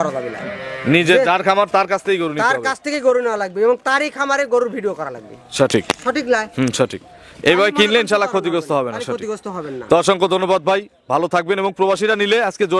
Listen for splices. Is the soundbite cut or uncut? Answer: uncut